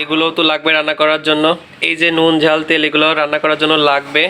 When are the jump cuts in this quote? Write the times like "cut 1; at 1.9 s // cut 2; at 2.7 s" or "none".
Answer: none

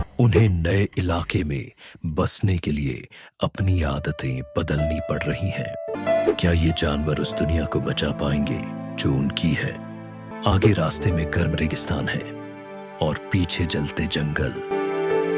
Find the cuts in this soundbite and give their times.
cut 1; at 5.9 s // cut 2; at 10.2 s

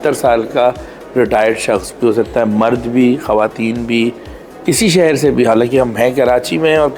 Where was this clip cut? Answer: none

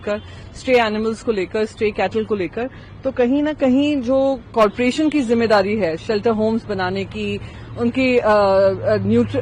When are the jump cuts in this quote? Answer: none

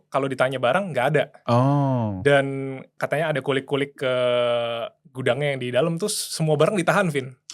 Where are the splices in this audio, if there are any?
cut 1; at 1.4 s // cut 2; at 2.9 s

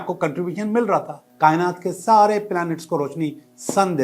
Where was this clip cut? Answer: cut 1; at 1.2 s

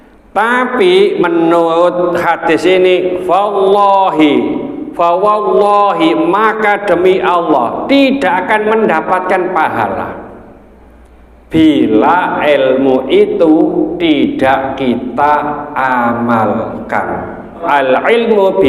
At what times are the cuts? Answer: cut 1; at 17.6 s

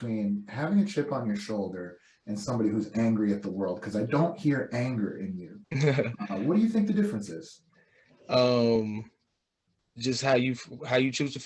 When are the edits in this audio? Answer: none

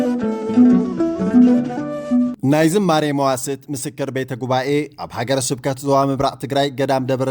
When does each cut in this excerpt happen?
cut 1; at 2.3 s

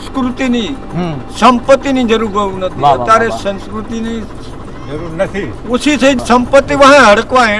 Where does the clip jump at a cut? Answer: none

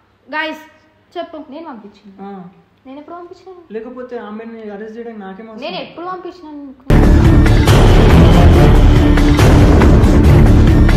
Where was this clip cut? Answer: none

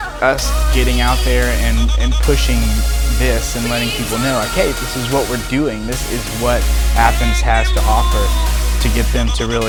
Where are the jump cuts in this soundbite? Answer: none

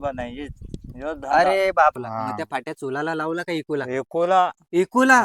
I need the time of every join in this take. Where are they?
cut 1; at 2.0 s

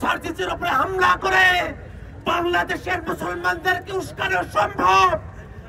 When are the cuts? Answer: none

